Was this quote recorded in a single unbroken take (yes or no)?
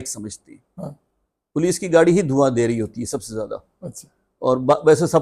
yes